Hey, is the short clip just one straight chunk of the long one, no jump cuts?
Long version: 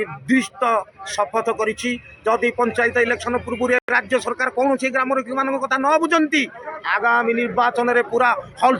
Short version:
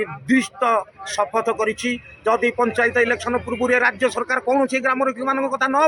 no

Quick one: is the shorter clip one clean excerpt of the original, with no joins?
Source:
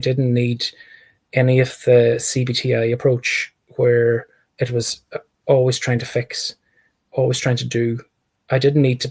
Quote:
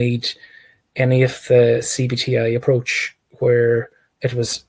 yes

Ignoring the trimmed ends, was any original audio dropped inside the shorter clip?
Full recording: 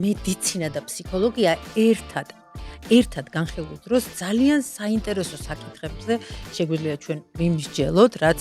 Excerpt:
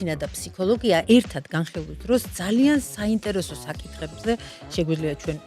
yes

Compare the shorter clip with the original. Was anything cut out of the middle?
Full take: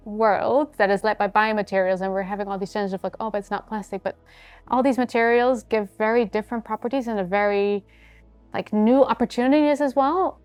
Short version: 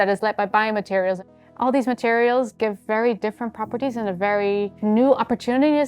yes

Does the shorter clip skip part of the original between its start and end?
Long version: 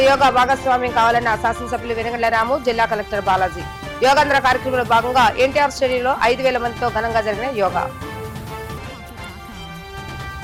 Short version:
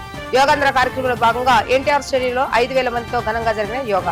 no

